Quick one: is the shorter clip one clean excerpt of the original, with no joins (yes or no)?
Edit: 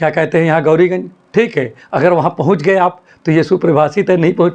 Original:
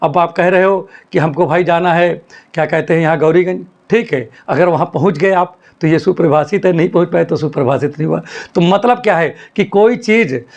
yes